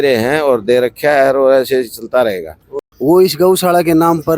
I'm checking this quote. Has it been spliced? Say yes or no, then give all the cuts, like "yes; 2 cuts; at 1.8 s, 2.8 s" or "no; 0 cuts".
yes; 1 cut; at 2.7 s